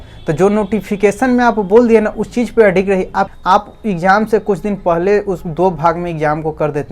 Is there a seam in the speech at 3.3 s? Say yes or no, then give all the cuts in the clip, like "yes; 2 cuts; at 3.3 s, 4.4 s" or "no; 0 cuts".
yes; 1 cut; at 3.3 s